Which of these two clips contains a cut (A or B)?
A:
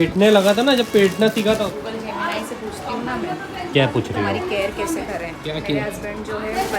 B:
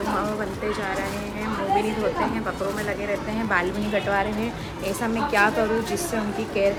A